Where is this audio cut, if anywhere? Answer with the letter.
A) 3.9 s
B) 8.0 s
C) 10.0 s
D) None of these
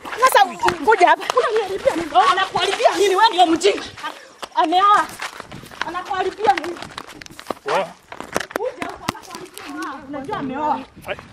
C